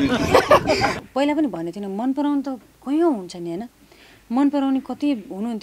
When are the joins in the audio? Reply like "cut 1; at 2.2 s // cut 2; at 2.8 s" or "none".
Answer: cut 1; at 0.9 s